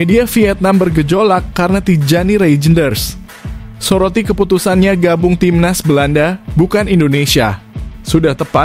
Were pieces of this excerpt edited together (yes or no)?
no